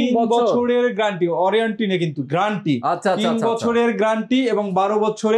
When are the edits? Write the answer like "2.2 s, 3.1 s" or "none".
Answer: none